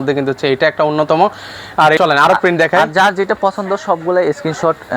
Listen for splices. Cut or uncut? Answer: cut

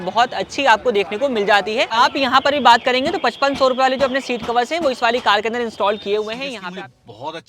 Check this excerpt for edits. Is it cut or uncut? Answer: cut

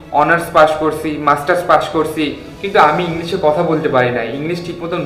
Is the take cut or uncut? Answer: uncut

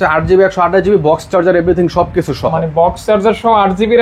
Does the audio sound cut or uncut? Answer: uncut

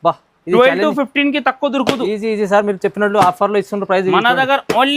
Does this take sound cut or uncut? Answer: uncut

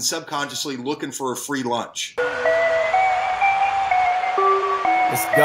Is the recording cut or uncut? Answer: cut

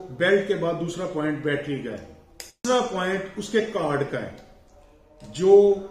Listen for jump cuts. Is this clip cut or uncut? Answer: cut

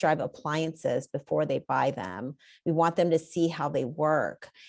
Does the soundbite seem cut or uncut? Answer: uncut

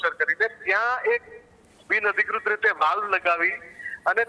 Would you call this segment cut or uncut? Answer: uncut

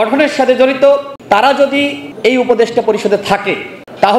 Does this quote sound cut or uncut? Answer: cut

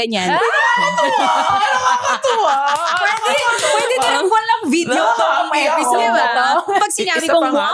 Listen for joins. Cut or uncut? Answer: uncut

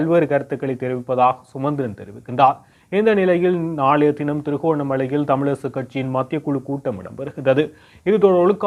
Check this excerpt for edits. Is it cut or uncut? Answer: uncut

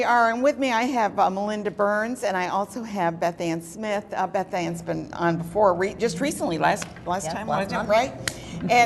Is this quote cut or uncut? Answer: uncut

